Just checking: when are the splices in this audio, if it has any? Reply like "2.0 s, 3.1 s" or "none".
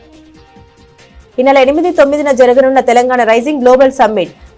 1.0 s